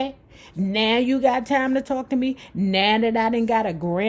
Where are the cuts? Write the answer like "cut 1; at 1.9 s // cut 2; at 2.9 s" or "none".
none